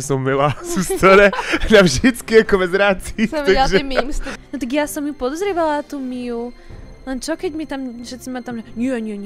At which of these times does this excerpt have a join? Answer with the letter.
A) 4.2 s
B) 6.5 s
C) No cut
A